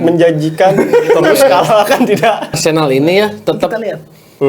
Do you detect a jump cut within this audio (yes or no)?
yes